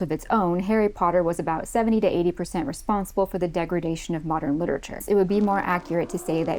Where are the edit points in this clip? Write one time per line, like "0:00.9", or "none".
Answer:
0:05.0